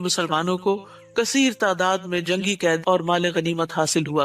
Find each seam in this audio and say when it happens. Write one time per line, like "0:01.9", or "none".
0:02.8